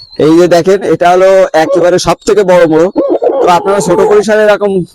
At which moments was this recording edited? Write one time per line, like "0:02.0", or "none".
none